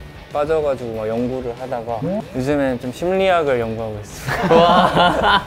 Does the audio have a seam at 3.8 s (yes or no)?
no